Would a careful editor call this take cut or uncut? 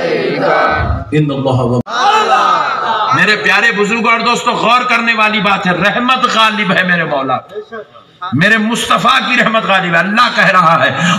cut